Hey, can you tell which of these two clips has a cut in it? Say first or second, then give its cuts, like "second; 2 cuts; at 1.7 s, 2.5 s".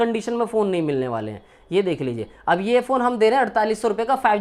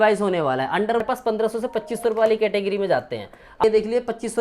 second; 2 cuts; at 1.0 s, 3.6 s